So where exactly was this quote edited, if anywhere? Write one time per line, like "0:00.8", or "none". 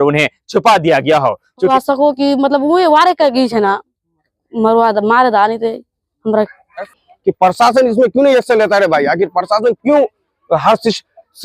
0:01.7
0:07.0